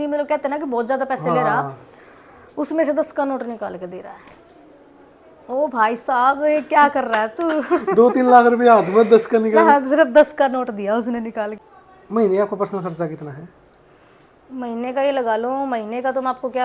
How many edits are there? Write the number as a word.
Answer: one